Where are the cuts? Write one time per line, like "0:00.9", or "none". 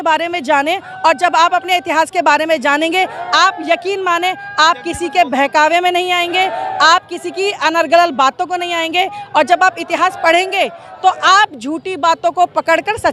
none